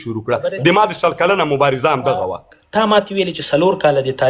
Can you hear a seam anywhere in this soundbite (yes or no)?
yes